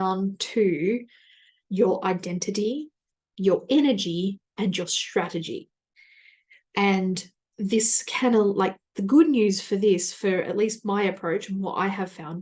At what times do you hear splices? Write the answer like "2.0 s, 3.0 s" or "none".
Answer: none